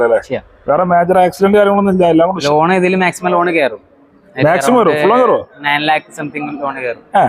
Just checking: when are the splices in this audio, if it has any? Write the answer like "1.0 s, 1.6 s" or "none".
2.4 s